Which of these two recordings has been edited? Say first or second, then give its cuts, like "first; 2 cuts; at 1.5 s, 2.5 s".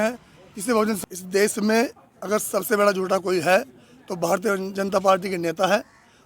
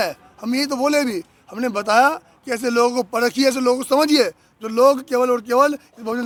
first; 1 cut; at 1.0 s